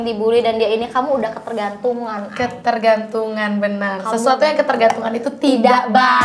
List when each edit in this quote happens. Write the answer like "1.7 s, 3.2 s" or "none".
none

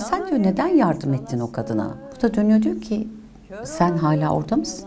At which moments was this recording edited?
2.0 s

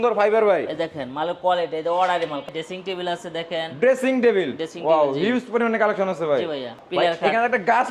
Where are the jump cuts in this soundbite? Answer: 2.5 s, 6.8 s

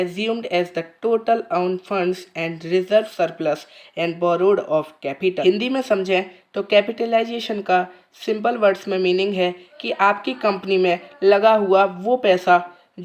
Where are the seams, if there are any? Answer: 5.4 s

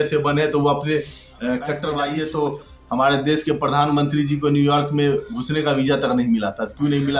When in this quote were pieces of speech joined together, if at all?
1.9 s

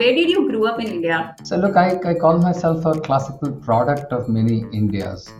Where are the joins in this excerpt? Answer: 1.4 s

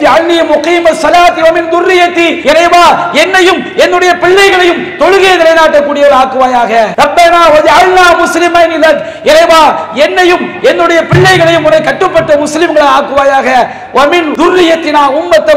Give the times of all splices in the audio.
2.4 s, 6.9 s, 14.3 s

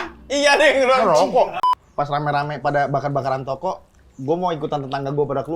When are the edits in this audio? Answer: 1.6 s

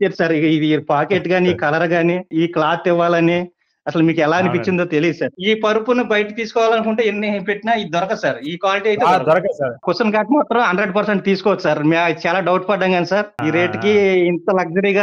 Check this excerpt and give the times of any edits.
2.3 s, 5.4 s, 9.8 s, 13.3 s

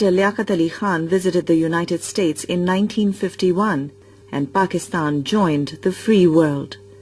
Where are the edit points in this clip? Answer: 1.2 s

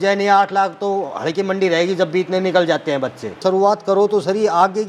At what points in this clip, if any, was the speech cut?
3.4 s

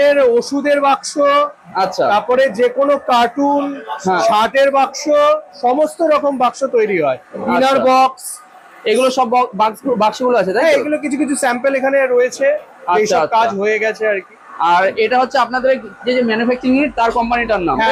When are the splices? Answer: none

